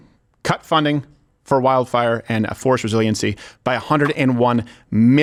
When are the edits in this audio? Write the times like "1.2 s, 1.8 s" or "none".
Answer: none